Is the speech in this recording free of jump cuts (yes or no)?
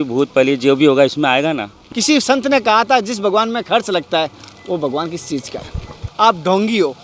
no